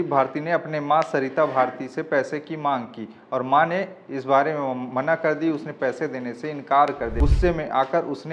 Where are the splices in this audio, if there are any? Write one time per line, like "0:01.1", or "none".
0:07.2